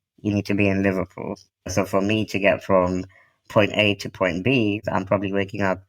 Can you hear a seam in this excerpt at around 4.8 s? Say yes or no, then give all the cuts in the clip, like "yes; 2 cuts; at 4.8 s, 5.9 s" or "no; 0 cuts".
yes; 2 cuts; at 1.5 s, 4.8 s